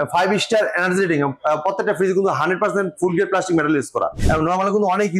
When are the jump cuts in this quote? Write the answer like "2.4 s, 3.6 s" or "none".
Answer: 4.1 s